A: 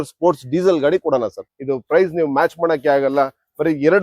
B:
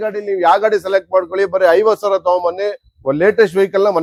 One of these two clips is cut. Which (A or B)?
A